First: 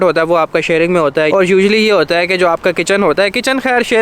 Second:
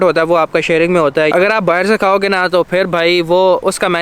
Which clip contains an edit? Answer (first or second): second